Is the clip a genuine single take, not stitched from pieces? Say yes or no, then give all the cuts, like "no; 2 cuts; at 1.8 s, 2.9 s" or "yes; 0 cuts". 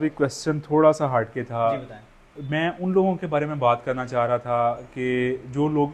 yes; 0 cuts